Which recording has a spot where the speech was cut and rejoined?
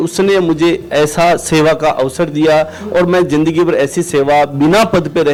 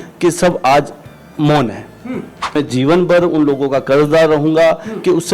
second; 1 cut; at 2.6 s

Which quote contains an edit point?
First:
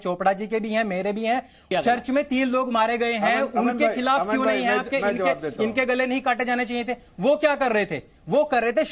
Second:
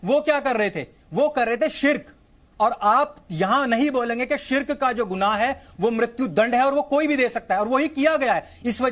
first; 1 cut; at 1.7 s

